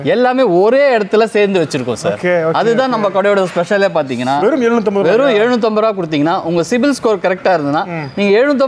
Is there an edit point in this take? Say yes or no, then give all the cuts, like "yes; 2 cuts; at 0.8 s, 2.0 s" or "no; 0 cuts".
yes; 1 cut; at 4.4 s